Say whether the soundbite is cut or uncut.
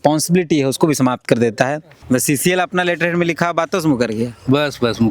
cut